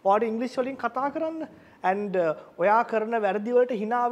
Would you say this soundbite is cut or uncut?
uncut